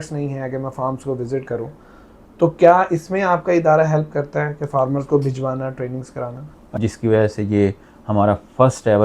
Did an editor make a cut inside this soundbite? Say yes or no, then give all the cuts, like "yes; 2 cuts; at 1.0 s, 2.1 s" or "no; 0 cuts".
yes; 1 cut; at 6.6 s